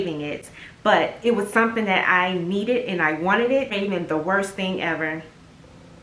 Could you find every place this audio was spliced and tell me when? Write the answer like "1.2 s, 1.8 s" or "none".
3.7 s